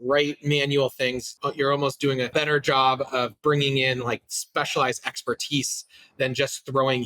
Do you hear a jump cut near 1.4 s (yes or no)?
yes